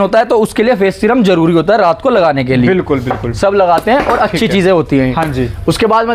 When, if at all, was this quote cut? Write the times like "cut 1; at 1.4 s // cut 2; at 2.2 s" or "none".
none